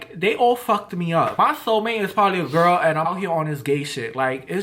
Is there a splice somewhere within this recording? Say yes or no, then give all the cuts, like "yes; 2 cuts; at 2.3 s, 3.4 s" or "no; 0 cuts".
yes; 2 cuts; at 1.3 s, 3.1 s